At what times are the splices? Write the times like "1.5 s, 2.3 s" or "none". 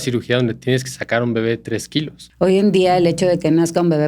2.2 s